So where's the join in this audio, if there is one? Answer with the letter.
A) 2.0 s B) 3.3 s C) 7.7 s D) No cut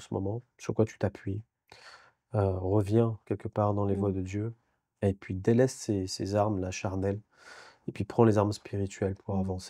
D